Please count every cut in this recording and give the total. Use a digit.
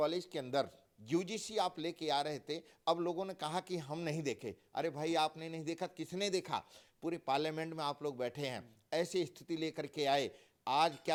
0